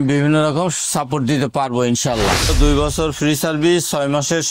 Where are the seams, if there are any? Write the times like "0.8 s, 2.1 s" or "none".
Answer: 2.5 s